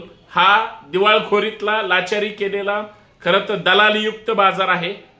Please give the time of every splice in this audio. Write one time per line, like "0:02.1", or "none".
none